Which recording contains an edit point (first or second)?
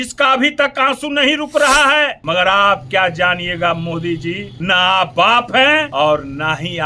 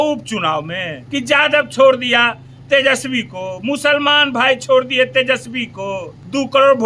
first